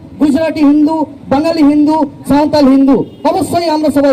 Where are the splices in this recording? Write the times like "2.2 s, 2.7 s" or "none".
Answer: none